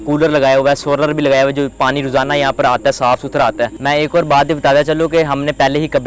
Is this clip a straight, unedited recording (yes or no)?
no